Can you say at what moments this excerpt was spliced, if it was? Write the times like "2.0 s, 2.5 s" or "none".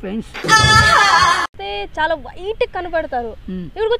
1.6 s